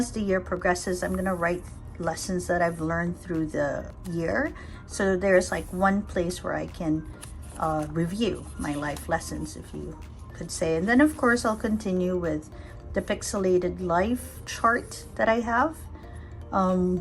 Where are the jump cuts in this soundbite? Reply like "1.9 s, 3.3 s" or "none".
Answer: none